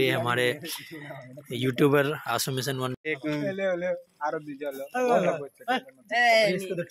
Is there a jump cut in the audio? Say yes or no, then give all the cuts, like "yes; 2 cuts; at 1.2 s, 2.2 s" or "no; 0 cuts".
yes; 1 cut; at 2.9 s